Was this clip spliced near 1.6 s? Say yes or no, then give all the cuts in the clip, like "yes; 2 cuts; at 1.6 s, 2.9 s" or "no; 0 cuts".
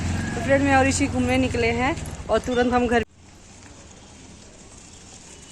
no; 1 cut; at 3.1 s